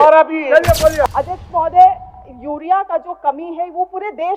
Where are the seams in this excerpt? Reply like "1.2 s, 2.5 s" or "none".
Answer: 1.0 s